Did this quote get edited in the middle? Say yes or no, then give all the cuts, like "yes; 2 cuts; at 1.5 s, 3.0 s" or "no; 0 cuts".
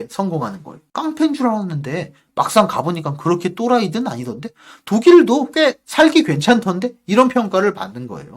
no; 0 cuts